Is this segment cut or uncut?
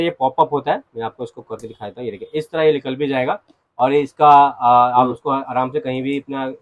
uncut